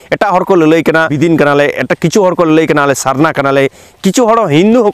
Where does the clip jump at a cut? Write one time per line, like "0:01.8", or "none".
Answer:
0:01.1